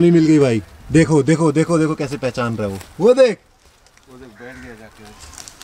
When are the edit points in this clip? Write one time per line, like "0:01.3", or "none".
none